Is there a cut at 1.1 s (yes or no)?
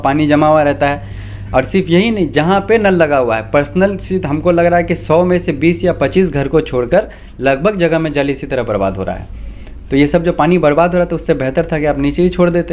no